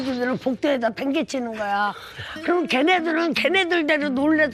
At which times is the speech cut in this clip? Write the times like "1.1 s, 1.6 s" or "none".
none